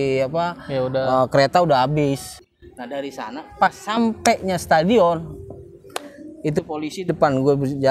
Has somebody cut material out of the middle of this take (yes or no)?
yes